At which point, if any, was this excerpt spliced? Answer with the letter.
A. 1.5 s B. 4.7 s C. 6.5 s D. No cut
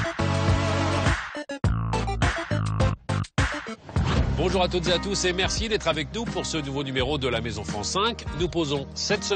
A